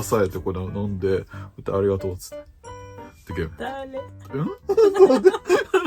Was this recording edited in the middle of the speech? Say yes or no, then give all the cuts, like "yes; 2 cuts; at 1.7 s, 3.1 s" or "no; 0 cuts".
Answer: yes; 1 cut; at 4.2 s